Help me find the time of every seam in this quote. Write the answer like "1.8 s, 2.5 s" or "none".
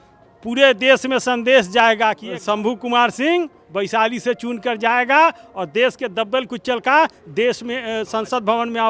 2.3 s